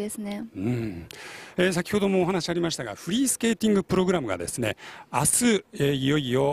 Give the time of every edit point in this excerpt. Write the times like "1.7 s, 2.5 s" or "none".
4.4 s